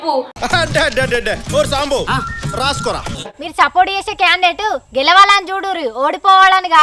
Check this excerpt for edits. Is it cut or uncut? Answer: cut